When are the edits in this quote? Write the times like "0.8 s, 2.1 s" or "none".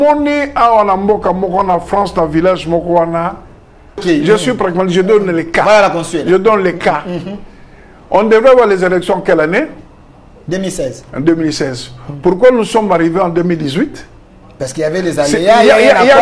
4.0 s